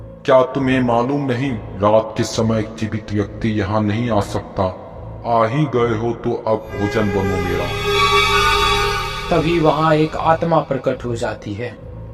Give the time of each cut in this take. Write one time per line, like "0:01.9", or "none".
none